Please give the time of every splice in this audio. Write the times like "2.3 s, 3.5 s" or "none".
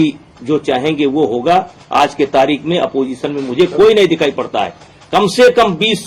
none